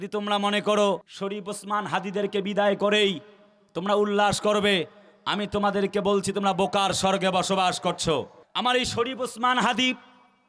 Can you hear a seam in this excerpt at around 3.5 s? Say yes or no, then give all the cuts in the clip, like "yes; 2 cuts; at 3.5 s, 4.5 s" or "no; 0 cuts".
no; 2 cuts; at 1.1 s, 8.4 s